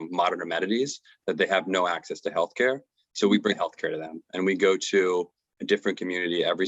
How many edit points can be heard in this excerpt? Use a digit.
1